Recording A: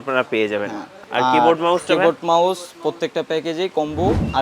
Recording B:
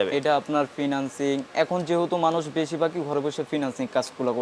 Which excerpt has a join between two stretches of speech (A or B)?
A